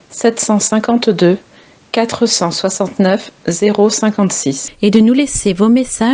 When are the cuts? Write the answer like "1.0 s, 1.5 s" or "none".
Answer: 4.7 s